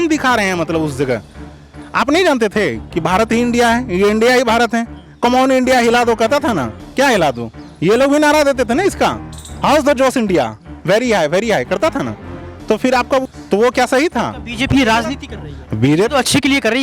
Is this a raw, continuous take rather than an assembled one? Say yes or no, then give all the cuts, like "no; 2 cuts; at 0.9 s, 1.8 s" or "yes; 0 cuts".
no; 1 cut; at 13.2 s